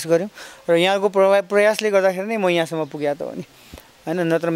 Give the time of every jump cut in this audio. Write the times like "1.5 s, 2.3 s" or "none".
none